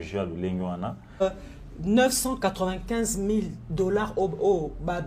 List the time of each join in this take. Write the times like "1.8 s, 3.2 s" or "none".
1.2 s

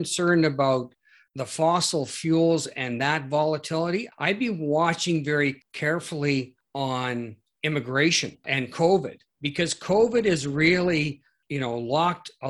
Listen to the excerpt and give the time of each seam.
4.1 s, 5.7 s, 6.9 s, 8.4 s, 11.3 s

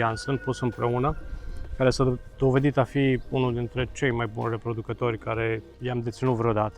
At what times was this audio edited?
5.7 s

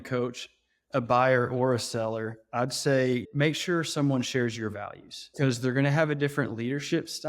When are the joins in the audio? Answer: 3.3 s, 5.3 s

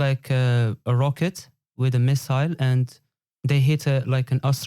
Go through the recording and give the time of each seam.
none

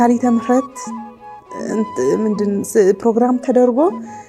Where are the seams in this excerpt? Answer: none

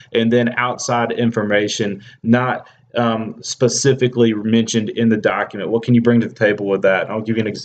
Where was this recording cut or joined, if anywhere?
6.3 s

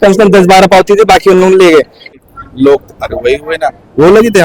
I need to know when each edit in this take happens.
2.0 s

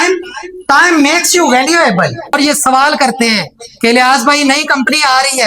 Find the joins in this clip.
2.4 s

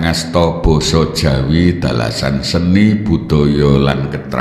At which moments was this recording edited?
none

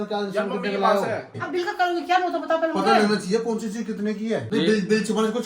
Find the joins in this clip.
1.4 s, 4.5 s

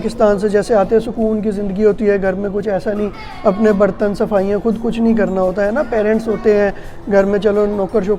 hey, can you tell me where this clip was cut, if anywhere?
none

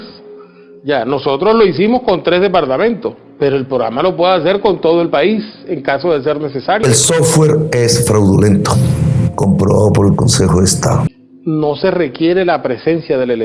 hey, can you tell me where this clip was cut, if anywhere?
6.8 s, 11.1 s

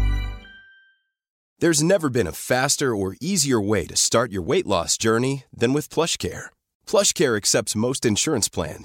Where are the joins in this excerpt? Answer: 1.4 s

